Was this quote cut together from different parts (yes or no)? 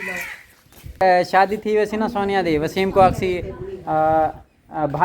yes